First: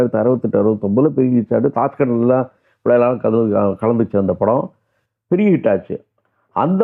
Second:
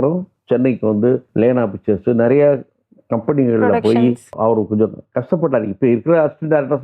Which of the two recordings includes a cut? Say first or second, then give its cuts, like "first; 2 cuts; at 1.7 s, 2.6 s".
second; 2 cuts; at 1.3 s, 4.3 s